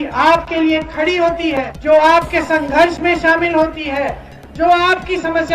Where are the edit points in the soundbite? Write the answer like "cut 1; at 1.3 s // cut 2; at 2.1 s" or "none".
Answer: cut 1; at 1.7 s